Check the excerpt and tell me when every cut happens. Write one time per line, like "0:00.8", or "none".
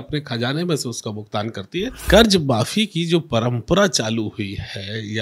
0:02.0

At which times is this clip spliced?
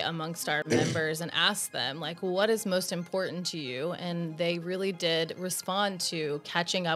none

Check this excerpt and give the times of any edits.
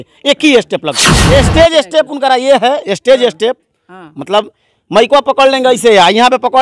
0:01.1

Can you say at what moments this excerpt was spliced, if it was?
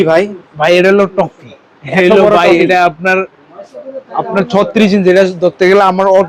none

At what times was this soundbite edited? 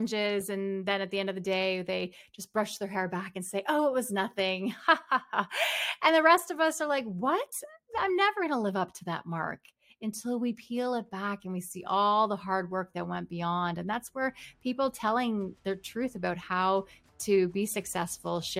none

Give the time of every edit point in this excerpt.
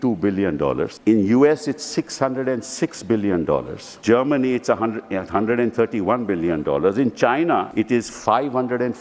0:00.9
0:03.8
0:07.7

